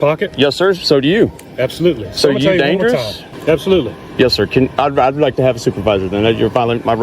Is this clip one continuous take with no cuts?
no; 1 cut; at 3.2 s

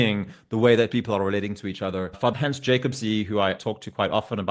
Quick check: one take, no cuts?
no; 2 cuts; at 2.3 s, 3.6 s

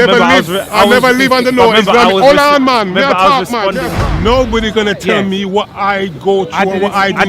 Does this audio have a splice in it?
yes; 1 cut; at 4.0 s

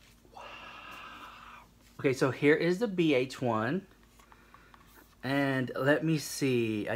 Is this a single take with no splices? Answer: no; 1 cut; at 1.8 s

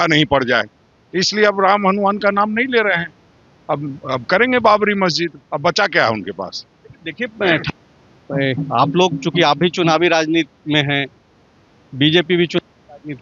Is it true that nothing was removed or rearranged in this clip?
yes; 0 cuts

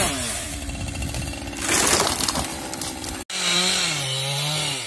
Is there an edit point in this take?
no; 0 cuts

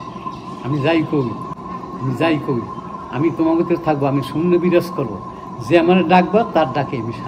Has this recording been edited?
yes; 1 cut; at 1.5 s

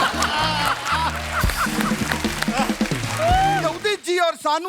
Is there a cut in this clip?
yes; 1 cut; at 3.6 s

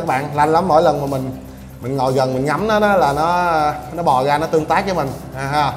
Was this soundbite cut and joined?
no; 0 cuts

